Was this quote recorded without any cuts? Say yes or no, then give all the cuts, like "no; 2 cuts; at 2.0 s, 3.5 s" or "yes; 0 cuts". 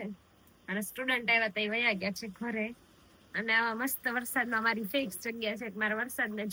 yes; 0 cuts